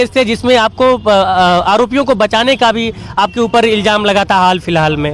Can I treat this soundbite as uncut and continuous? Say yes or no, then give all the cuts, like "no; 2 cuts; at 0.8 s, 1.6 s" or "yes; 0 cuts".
yes; 0 cuts